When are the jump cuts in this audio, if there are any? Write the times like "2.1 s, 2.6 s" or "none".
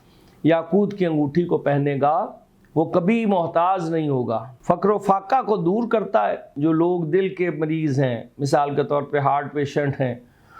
4.5 s, 6.5 s